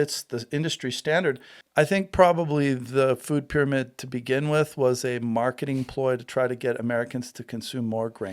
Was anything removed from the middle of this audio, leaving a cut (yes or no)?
yes